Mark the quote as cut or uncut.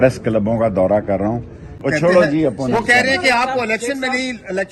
cut